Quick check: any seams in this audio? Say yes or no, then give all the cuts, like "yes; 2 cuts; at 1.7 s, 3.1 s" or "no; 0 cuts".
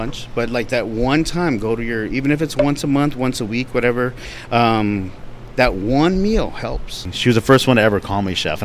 yes; 1 cut; at 7.1 s